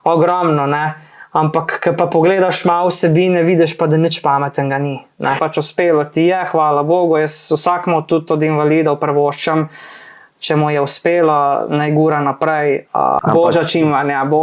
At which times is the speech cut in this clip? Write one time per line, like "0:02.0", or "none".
0:05.4
0:13.2